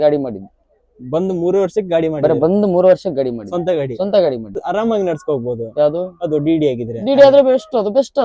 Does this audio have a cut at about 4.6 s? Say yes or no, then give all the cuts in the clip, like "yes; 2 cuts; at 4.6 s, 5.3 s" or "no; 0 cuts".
yes; 1 cut; at 4.6 s